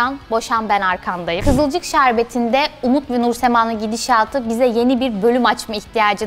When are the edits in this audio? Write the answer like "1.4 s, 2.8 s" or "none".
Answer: 1.4 s